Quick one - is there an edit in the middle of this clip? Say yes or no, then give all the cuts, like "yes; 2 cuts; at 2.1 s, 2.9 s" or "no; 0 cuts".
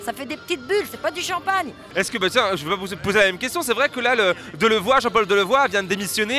no; 0 cuts